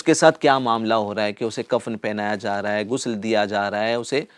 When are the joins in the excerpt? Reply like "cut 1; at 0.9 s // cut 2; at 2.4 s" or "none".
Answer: none